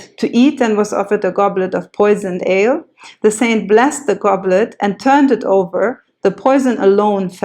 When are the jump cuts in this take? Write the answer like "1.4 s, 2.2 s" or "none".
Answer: none